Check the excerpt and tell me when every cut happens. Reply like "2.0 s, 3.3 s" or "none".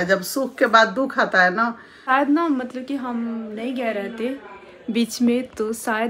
2.0 s